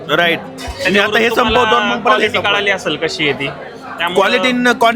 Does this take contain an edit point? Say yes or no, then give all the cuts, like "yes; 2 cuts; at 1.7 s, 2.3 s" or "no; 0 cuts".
no; 0 cuts